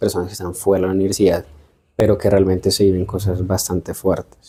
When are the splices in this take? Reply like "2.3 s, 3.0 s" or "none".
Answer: none